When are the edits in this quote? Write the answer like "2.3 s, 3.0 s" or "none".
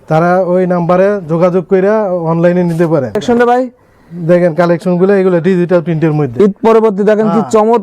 3.2 s

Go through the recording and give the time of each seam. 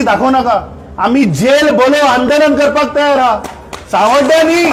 none

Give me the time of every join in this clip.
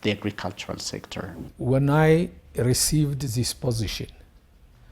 1.5 s

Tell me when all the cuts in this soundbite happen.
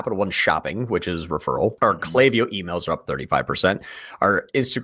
1.8 s

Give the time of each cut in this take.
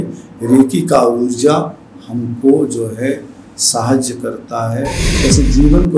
5.0 s

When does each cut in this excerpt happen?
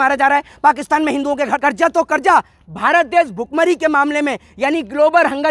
1.6 s

